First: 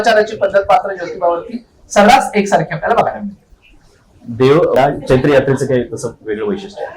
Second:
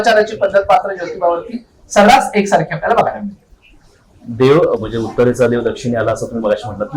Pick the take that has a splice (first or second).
first